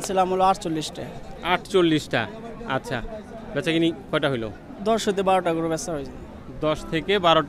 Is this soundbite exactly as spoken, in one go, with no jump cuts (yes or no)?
yes